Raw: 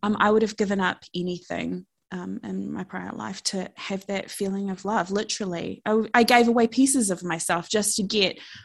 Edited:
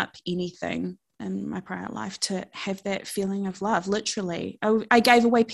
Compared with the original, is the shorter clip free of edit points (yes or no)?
no